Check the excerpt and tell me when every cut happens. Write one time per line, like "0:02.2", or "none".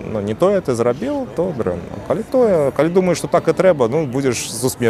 none